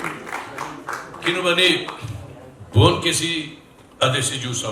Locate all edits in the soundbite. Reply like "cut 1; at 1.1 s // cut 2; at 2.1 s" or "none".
none